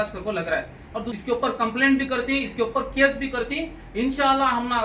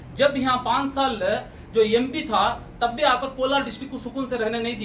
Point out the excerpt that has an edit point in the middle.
first; 1 cut; at 1.1 s

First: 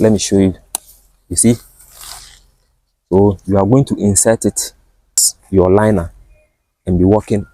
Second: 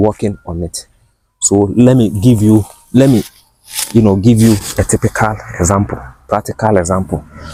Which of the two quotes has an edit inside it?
first; 1 cut; at 5.3 s

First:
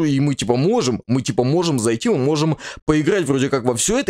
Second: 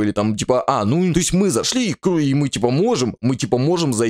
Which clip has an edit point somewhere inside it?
second; 1 cut; at 1.1 s

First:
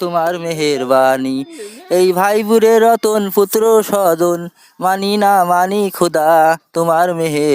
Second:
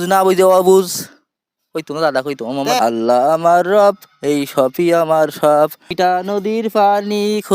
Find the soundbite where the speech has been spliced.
second; 2 cuts; at 2.8 s, 5.8 s

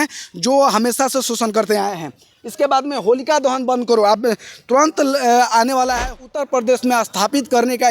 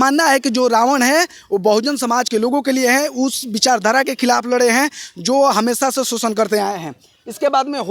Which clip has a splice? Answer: first; 1 cut; at 6.2 s

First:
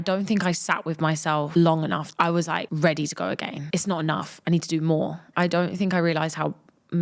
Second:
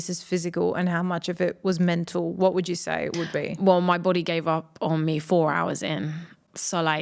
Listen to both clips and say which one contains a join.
first; 4 cuts; at 1.5 s, 2.3 s, 3.5 s, 5.2 s

